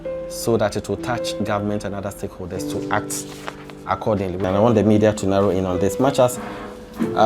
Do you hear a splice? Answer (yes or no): yes